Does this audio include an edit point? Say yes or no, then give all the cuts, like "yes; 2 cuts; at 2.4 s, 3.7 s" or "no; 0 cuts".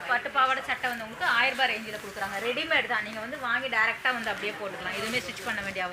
no; 0 cuts